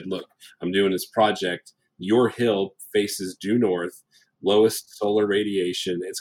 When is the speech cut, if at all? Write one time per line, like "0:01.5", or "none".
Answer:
none